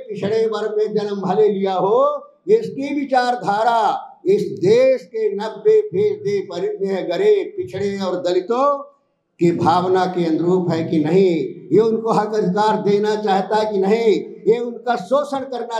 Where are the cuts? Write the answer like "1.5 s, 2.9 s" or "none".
none